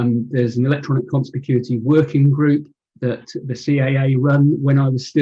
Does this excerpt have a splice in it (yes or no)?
yes